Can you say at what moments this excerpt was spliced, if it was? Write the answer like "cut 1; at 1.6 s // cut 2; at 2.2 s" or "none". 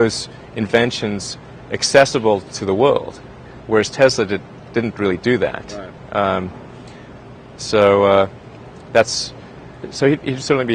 none

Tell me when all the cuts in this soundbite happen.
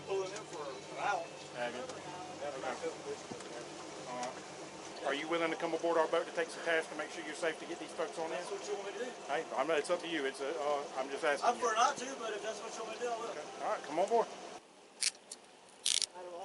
cut 1; at 4.8 s // cut 2; at 14.6 s

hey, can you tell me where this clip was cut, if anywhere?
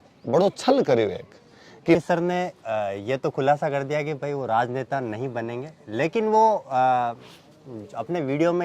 cut 1; at 2.0 s

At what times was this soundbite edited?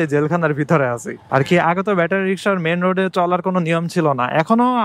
cut 1; at 1.2 s

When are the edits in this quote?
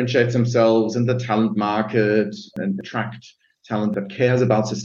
cut 1; at 2.5 s // cut 2; at 3.9 s

